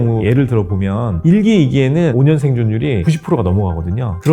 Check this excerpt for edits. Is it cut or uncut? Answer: cut